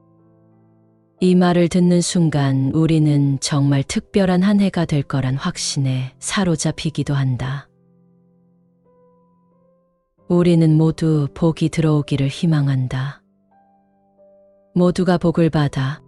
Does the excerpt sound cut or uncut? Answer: uncut